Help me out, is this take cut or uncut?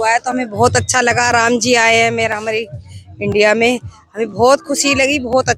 uncut